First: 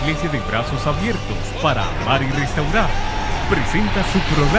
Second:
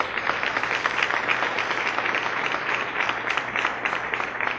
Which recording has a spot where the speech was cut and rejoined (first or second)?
second